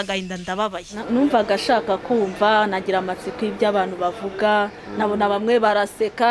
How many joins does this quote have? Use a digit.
1